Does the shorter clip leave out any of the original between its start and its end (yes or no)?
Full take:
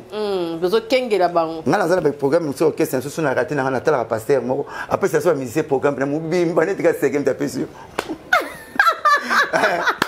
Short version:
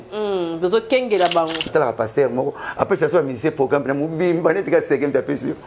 yes